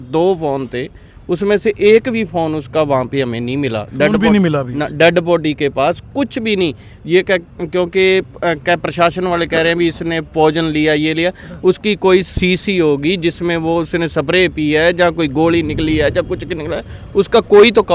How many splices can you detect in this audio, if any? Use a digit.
0